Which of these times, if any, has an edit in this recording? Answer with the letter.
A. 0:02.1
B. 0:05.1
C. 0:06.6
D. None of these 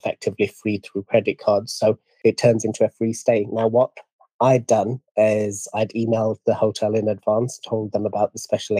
A